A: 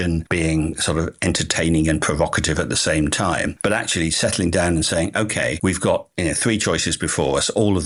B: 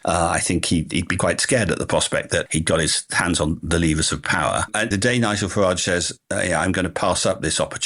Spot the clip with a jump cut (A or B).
B